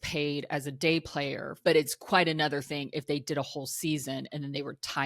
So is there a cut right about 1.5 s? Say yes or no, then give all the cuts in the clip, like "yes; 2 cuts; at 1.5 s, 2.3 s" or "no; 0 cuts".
yes; 1 cut; at 1.5 s